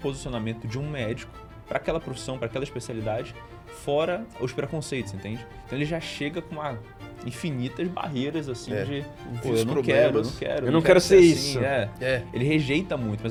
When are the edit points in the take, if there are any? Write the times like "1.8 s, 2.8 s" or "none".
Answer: none